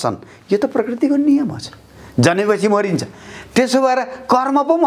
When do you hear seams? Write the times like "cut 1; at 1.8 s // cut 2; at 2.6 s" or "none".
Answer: none